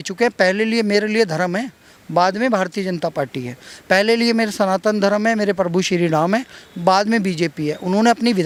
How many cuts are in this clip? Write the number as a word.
zero